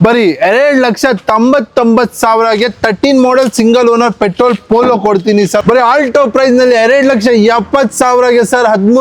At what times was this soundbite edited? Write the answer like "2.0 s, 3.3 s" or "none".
5.6 s